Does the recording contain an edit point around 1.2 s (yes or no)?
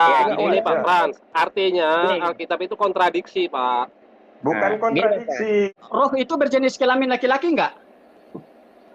no